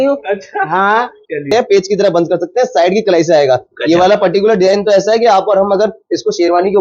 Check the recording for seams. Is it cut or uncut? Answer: cut